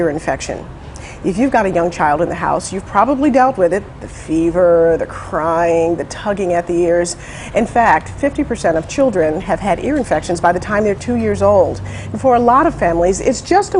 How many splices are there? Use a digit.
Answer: 0